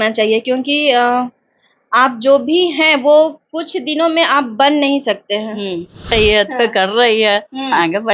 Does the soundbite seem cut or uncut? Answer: cut